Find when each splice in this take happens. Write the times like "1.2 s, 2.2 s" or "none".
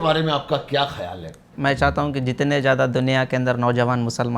1.5 s